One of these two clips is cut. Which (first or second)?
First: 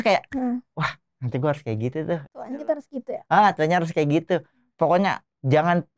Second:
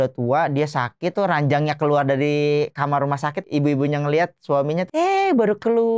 second